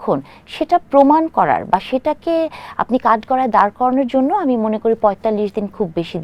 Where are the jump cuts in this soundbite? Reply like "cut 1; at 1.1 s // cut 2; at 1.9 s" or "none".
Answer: none